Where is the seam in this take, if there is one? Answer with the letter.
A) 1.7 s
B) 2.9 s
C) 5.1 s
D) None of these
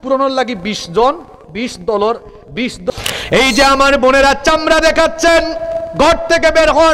B